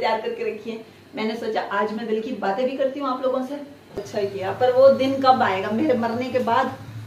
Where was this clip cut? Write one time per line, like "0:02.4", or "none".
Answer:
0:04.0